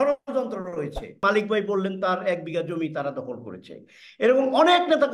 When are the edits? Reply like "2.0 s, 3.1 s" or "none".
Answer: 1.2 s